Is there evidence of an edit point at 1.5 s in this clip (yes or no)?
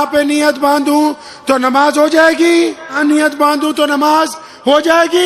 no